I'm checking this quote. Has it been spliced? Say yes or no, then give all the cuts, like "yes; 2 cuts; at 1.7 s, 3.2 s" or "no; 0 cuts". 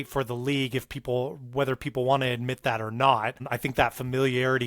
yes; 1 cut; at 3.5 s